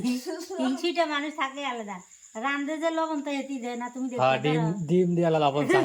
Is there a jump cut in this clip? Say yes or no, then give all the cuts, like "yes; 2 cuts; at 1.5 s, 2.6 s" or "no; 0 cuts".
no; 0 cuts